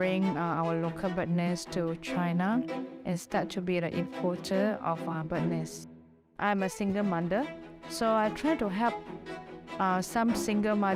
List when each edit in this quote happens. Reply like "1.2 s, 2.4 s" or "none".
6.4 s